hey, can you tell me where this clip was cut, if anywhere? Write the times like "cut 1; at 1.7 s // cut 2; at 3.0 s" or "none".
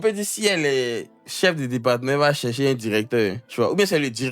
cut 1; at 3.4 s

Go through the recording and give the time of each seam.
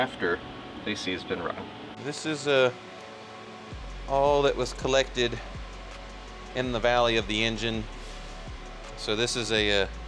cut 1; at 1.9 s

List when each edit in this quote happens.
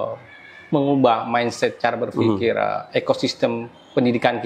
none

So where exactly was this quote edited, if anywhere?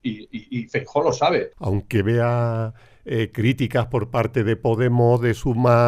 cut 1; at 1.6 s

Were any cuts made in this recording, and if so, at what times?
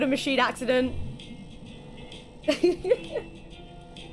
none

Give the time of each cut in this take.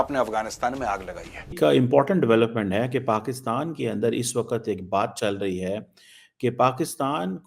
cut 1; at 1.5 s

